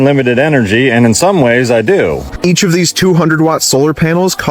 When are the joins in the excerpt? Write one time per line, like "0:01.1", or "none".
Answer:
0:02.3